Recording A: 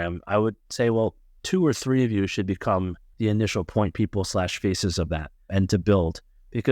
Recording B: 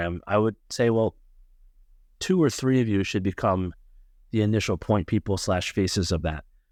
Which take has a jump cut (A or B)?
A